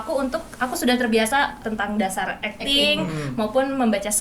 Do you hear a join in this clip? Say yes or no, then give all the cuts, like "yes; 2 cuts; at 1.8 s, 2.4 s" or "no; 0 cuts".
yes; 1 cut; at 1.6 s